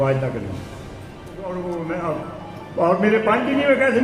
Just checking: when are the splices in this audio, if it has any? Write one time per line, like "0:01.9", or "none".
0:01.4